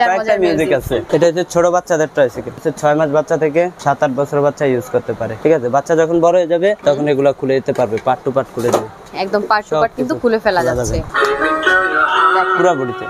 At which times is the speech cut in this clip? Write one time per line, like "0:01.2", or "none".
0:01.0
0:02.7
0:03.8
0:05.3
0:06.8
0:09.1
0:11.1